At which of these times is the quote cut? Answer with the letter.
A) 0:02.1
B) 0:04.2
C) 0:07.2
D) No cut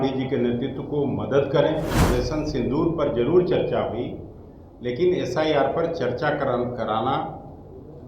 A